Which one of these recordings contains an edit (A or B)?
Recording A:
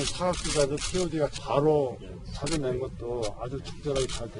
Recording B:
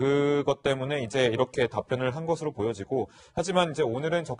A